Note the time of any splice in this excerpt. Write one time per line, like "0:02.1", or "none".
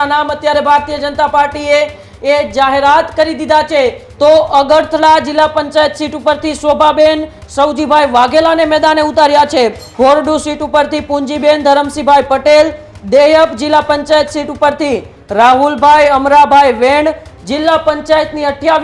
0:04.0
0:09.8
0:17.3